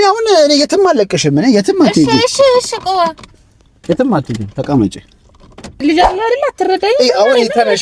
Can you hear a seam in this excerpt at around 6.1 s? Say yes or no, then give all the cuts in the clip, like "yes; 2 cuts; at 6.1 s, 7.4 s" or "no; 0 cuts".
yes; 1 cut; at 6.1 s